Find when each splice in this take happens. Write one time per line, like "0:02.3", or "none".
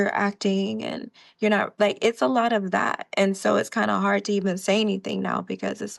none

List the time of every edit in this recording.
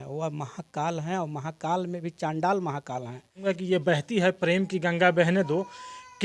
0:03.4

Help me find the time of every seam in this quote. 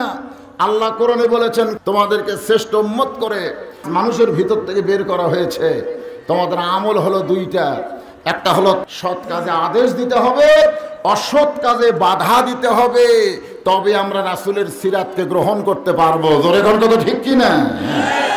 0:01.8
0:03.8
0:08.8

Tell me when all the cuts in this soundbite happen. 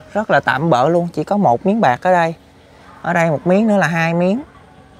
none

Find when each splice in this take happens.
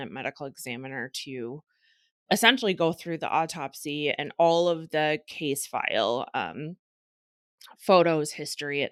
none

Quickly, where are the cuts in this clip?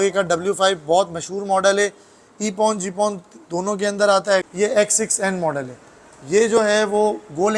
0:04.5

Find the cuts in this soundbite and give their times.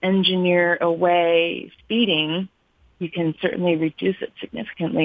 none

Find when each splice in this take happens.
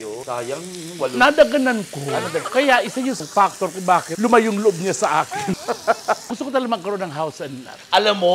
0:02.5
0:06.3

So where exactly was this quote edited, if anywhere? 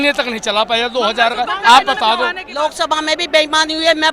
0:02.4

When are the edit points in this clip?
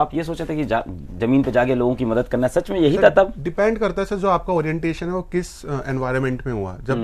none

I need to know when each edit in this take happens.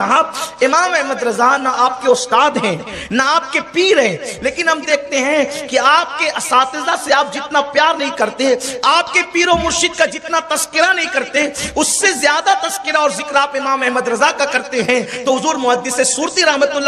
none

